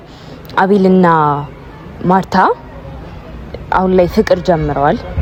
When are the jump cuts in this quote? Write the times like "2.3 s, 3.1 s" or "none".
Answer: none